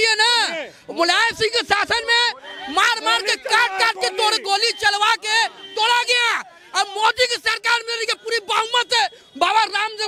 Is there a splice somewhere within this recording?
no; 0 cuts

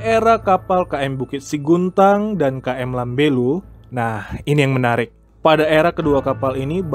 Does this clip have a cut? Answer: no; 0 cuts

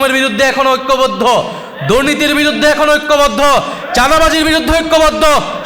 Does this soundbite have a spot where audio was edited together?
no; 0 cuts

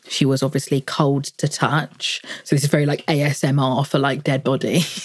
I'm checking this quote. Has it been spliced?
no; 0 cuts

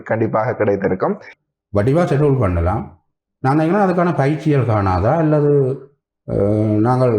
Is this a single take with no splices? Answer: no; 1 cut; at 1.3 s

